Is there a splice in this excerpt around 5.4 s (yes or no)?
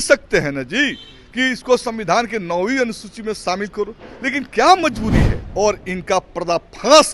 yes